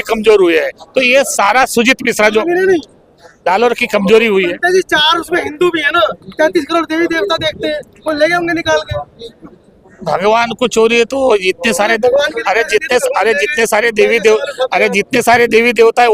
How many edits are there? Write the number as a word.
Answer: zero